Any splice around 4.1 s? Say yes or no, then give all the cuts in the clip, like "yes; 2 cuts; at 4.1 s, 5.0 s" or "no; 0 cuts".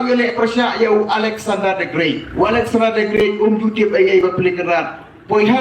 no; 1 cut; at 2.2 s